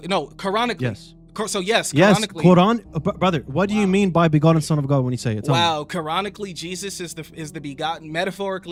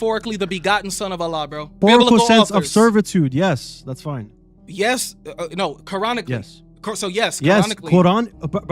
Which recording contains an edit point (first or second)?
second